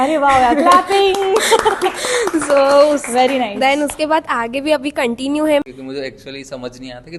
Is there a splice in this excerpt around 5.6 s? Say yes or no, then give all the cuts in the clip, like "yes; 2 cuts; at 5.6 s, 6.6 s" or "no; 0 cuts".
yes; 1 cut; at 5.6 s